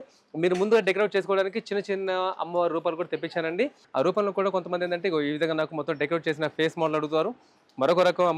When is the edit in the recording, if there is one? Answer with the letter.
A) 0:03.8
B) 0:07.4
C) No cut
A